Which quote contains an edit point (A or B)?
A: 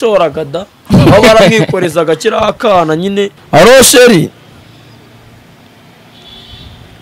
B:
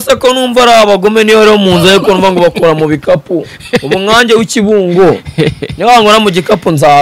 A